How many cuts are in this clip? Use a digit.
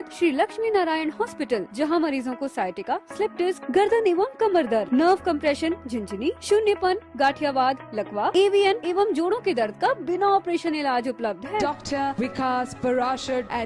0